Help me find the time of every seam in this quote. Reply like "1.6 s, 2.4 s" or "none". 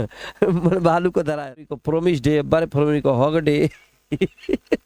1.7 s